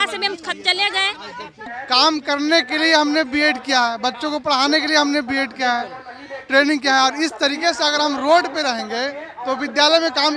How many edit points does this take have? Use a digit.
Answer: 1